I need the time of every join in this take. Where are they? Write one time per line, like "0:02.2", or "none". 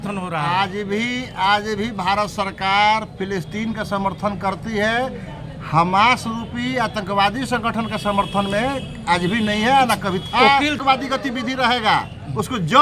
0:10.8